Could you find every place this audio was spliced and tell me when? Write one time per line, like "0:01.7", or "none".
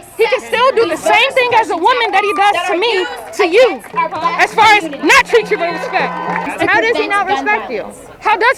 none